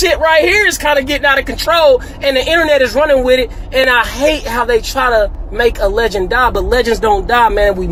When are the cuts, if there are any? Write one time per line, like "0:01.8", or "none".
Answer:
none